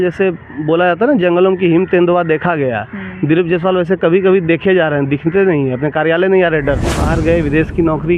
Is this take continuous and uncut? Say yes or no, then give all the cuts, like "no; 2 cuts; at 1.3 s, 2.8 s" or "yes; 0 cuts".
no; 1 cut; at 7.0 s